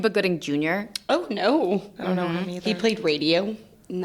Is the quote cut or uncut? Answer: uncut